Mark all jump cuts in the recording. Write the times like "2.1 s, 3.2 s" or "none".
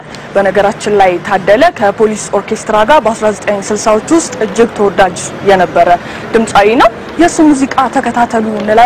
3.2 s